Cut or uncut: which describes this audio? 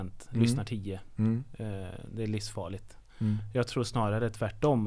uncut